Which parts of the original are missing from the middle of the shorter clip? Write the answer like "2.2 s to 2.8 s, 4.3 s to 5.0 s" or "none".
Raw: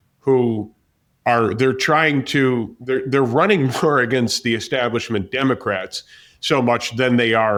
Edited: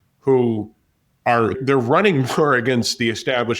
1.6 s to 3.0 s